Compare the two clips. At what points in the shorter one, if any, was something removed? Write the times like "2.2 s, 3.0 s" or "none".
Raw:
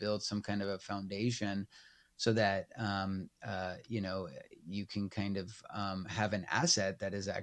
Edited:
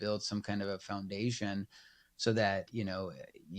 2.7 s